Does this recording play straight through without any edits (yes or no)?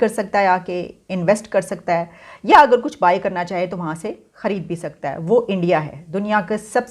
yes